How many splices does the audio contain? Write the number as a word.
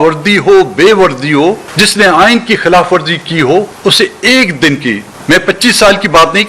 zero